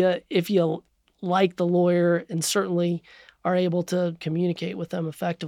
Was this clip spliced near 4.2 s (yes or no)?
yes